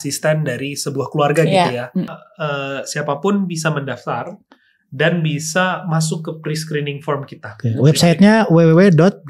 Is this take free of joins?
no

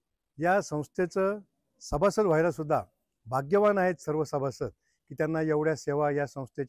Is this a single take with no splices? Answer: yes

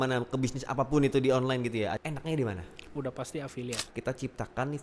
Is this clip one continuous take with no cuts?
no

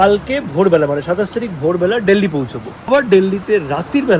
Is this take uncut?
no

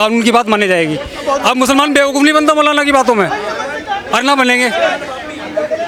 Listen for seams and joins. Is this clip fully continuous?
yes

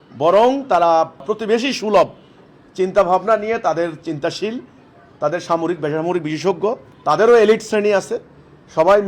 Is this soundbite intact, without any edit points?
no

